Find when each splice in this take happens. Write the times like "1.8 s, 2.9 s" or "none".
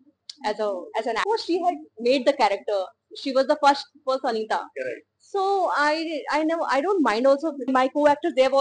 1.2 s, 7.7 s